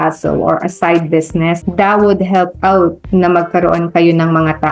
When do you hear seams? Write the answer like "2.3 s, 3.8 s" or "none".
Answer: 1.6 s